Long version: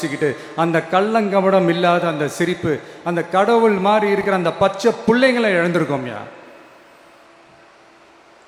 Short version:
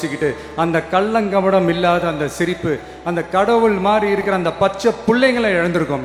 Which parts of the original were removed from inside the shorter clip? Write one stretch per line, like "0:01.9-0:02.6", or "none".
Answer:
none